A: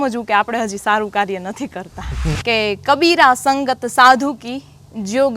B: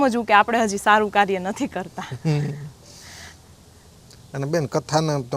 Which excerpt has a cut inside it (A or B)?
A